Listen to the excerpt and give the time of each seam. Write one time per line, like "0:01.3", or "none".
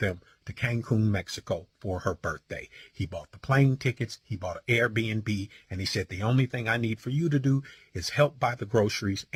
none